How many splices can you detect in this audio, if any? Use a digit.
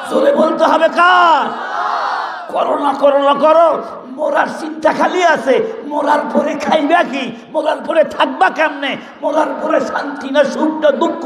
0